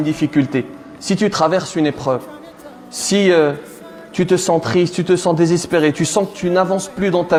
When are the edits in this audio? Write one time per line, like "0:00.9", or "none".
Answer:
none